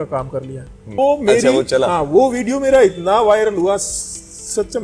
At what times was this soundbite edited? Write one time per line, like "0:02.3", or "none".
0:00.9